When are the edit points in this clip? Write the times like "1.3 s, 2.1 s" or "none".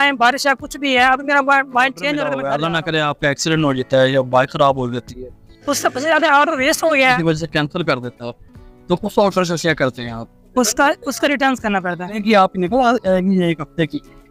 2.3 s, 7.2 s, 12.2 s